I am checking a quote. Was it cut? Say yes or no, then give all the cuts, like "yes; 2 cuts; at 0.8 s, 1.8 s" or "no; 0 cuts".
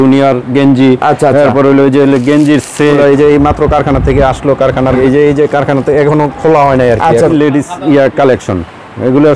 yes; 3 cuts; at 3.0 s, 5.0 s, 7.3 s